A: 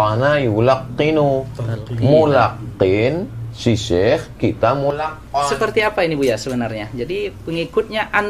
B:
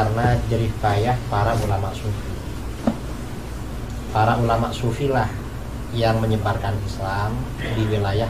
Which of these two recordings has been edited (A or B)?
A